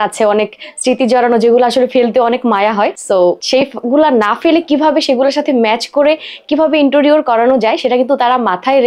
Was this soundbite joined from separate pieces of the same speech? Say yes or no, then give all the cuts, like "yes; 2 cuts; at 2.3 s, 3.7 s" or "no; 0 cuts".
yes; 1 cut; at 3.3 s